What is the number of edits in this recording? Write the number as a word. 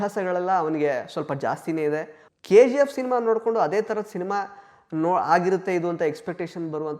one